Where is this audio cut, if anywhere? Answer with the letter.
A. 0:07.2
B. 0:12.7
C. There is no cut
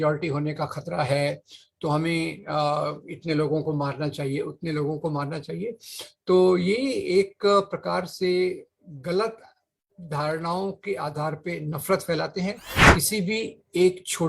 B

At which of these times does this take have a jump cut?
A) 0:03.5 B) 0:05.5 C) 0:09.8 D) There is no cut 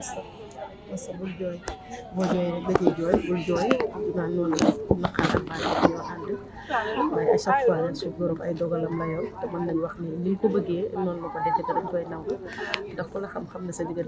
D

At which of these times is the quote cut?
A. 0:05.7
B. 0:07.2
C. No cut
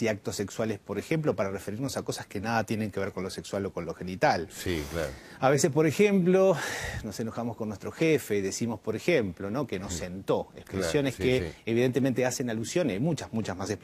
B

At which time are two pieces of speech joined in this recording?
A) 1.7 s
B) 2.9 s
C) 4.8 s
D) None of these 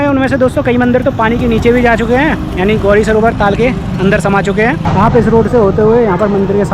C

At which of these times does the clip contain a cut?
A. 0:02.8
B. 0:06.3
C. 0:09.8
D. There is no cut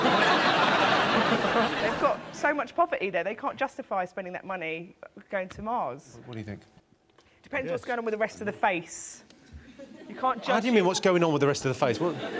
B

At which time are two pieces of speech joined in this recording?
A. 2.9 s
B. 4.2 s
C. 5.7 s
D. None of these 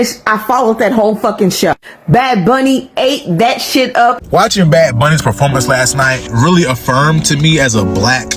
B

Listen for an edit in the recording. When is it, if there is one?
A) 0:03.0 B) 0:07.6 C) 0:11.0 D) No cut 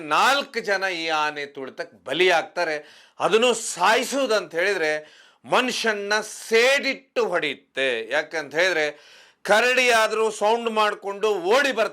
D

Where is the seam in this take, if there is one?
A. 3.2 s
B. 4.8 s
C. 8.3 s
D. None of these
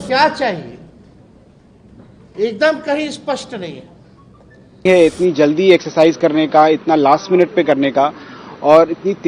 B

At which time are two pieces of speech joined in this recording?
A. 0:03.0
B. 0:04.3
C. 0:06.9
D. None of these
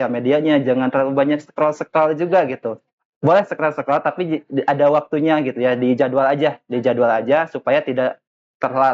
D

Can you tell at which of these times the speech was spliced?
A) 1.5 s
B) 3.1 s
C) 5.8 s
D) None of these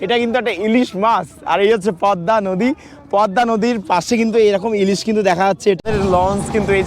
C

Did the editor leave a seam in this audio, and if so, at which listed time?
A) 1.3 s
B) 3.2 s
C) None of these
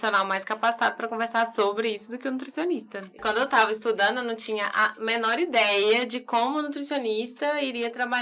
B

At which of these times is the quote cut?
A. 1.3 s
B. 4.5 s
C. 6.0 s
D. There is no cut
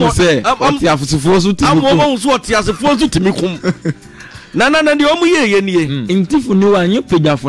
C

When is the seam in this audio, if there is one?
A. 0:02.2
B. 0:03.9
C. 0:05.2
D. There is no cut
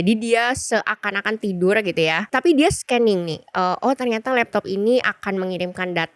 A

